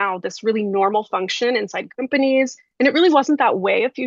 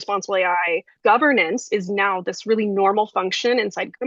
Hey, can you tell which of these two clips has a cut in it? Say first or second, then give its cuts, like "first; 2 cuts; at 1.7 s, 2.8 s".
second; 1 cut; at 0.9 s